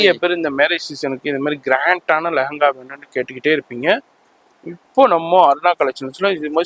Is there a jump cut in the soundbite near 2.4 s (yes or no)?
no